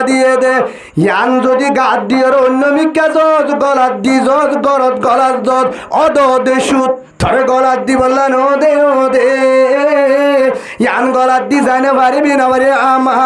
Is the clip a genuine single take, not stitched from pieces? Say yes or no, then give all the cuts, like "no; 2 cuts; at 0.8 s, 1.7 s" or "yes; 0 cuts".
no; 1 cut; at 7.1 s